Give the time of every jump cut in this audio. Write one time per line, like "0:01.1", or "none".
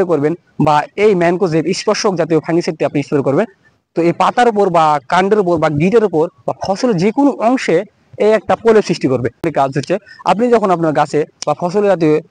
0:09.5